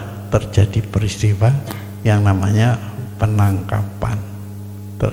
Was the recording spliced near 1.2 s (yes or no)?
no